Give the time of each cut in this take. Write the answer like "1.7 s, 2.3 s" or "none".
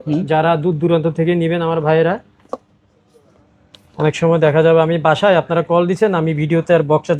none